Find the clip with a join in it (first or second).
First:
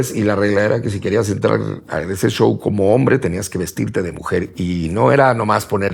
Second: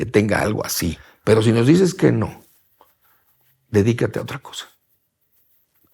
second